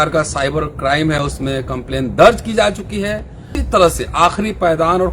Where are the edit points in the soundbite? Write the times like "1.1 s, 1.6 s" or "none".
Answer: 3.6 s